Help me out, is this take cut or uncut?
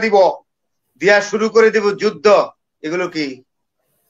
uncut